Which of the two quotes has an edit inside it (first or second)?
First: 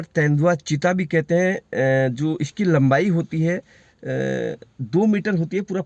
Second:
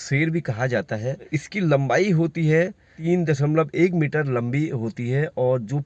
second